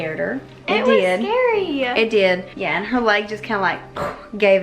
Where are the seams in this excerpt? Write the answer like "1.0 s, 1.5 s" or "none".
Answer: 2.5 s